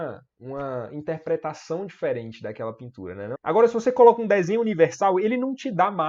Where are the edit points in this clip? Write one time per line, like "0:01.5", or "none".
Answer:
0:03.4